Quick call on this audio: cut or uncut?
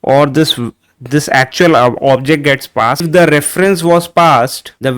cut